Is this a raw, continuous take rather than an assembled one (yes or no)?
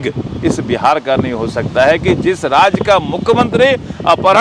yes